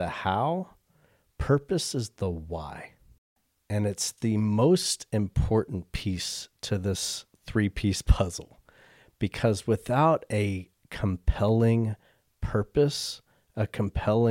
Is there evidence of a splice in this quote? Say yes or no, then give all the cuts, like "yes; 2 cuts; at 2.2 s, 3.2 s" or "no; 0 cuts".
yes; 1 cut; at 3.4 s